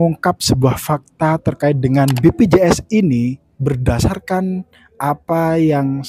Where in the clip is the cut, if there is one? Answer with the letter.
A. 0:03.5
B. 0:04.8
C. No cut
A